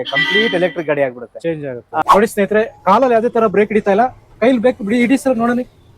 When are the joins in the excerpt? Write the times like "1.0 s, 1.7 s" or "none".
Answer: 2.0 s